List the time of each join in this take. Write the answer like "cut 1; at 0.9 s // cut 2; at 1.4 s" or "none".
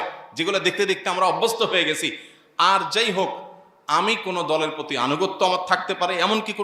none